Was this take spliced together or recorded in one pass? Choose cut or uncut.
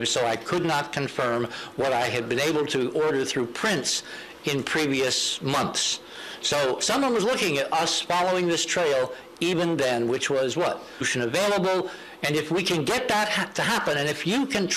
uncut